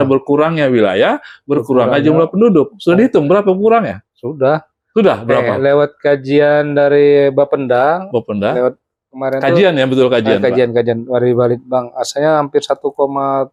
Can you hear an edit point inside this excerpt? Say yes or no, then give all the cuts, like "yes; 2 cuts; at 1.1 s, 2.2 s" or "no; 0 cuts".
no; 0 cuts